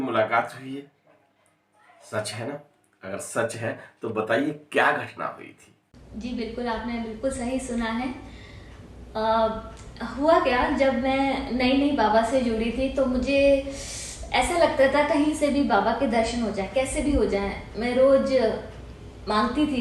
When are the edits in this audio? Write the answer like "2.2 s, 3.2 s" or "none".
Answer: 5.8 s